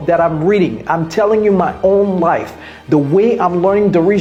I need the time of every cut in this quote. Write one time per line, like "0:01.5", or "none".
none